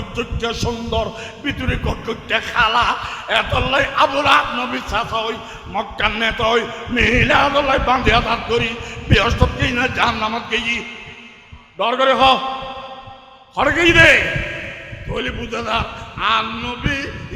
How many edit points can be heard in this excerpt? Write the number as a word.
zero